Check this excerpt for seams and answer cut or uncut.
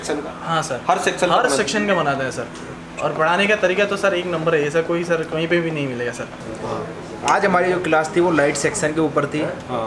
cut